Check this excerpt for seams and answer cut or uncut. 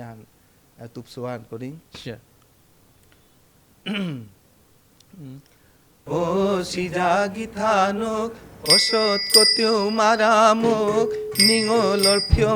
uncut